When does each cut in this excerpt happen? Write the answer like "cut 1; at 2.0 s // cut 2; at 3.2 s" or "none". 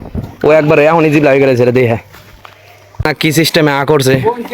cut 1; at 3.1 s

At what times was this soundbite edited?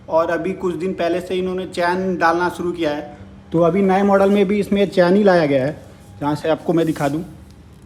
none

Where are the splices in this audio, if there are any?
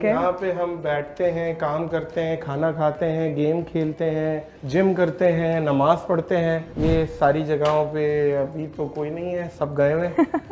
cut 1; at 4.5 s // cut 2; at 6.7 s

